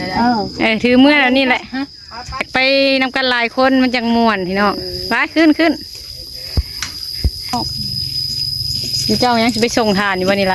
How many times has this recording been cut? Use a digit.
2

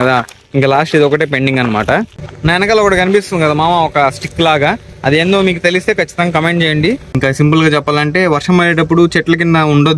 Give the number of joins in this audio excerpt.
2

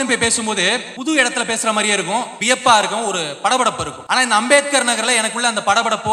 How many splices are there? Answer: 3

